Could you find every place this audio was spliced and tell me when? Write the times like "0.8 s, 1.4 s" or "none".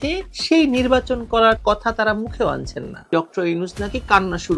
3.1 s